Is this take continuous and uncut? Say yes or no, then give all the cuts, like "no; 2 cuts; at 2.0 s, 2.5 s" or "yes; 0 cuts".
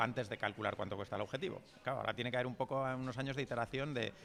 yes; 0 cuts